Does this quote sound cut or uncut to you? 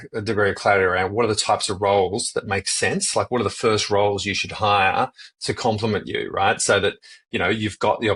uncut